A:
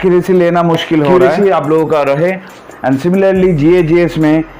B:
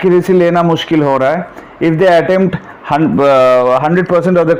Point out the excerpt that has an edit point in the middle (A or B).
A